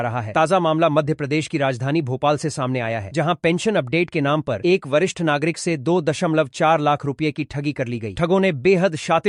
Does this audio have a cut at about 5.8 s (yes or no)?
no